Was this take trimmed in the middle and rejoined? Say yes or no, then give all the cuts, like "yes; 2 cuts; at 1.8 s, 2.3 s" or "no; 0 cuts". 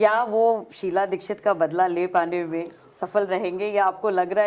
no; 0 cuts